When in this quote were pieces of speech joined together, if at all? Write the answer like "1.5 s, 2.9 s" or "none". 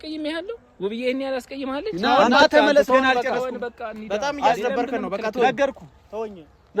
1.9 s